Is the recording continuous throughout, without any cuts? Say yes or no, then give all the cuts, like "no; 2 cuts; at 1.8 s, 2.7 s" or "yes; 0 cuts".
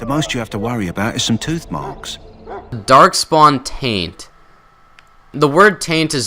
no; 1 cut; at 5.3 s